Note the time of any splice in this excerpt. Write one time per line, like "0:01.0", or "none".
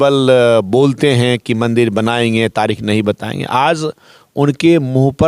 none